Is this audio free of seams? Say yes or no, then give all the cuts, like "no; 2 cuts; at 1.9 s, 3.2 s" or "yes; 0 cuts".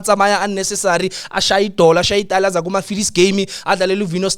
yes; 0 cuts